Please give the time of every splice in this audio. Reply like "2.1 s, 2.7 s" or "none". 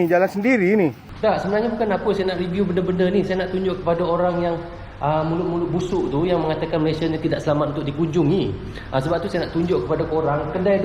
1.1 s

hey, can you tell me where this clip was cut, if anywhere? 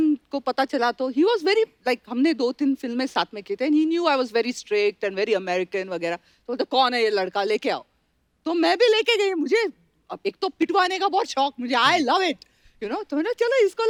none

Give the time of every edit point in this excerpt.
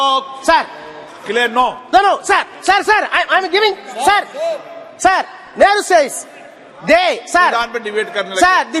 none

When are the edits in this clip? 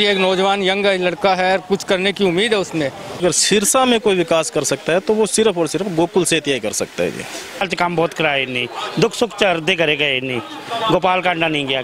3.2 s, 7.7 s

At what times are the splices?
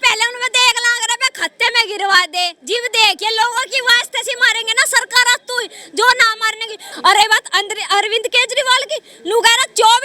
6.9 s

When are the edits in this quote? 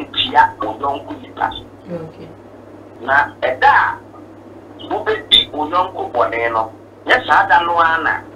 2.9 s

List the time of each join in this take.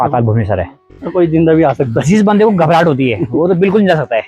1.0 s

